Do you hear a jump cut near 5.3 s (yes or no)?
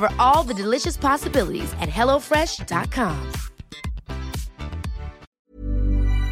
yes